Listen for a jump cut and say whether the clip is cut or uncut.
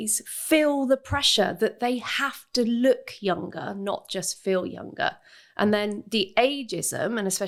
uncut